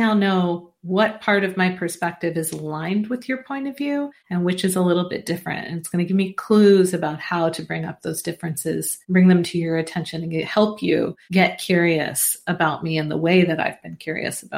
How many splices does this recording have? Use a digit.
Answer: 3